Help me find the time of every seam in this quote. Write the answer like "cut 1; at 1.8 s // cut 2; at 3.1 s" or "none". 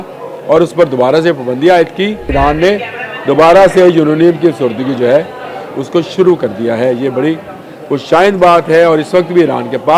cut 1; at 2.3 s